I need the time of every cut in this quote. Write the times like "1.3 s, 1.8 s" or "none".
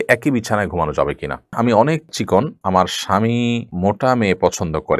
1.5 s